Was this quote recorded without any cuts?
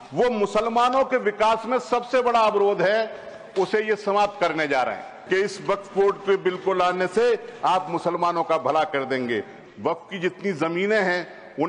no; 2 cuts; at 5.1 s, 9.5 s

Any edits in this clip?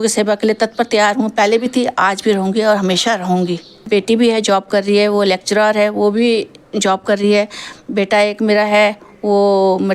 yes; 1 cut; at 3.8 s

